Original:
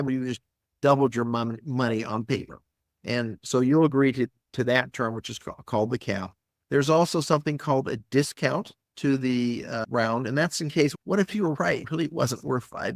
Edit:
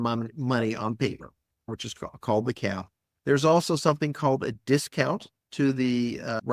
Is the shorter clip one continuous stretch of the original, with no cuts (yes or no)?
no